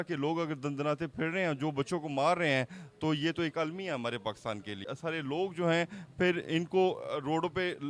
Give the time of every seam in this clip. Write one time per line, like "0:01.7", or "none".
0:04.9